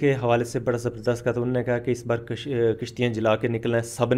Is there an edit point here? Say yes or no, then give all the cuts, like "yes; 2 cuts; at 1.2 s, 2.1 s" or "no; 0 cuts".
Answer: no; 0 cuts